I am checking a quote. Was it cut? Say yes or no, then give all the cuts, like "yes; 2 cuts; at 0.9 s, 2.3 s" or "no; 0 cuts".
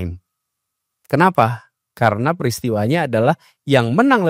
no; 0 cuts